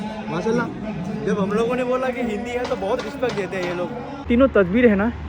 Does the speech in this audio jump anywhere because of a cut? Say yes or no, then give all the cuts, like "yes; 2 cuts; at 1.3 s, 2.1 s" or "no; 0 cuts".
yes; 1 cut; at 4.2 s